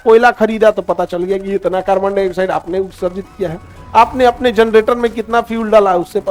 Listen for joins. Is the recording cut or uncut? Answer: uncut